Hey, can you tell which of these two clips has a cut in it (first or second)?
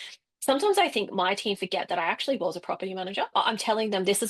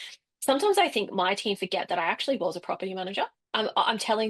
first